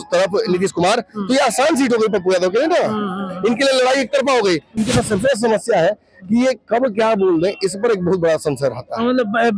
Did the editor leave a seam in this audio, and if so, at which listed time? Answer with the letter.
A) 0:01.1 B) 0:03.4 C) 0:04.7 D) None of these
C